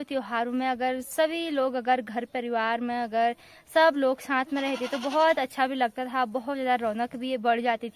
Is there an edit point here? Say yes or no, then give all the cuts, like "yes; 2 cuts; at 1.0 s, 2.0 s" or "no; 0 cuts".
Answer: no; 0 cuts